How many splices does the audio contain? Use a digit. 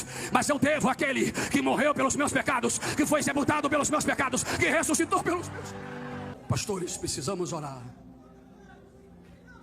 1